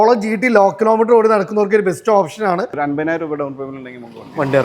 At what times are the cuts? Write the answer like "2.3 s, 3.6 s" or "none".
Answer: 2.7 s